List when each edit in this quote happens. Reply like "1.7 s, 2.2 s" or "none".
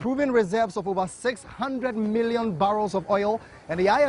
2.3 s